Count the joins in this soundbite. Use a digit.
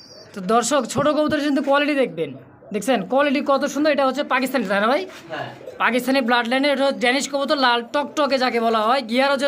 0